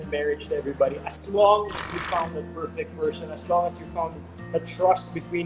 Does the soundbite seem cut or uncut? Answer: uncut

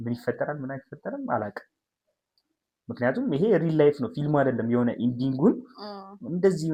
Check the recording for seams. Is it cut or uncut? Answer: uncut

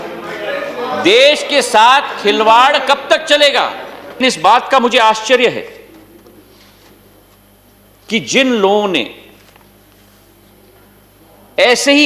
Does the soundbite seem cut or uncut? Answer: cut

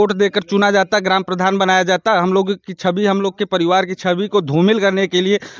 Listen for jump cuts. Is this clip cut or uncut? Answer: uncut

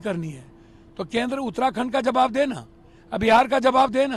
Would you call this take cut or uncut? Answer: uncut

